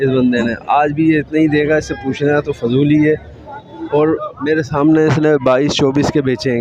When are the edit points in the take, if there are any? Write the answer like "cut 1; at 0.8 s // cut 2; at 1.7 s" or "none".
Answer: none